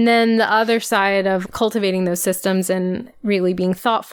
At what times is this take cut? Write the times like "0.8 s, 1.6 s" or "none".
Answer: 1.4 s, 3.1 s